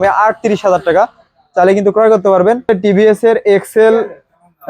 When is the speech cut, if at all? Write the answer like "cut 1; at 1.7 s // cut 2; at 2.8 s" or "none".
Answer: cut 1; at 2.7 s